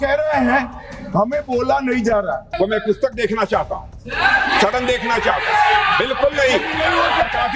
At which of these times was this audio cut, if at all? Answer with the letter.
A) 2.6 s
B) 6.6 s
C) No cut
A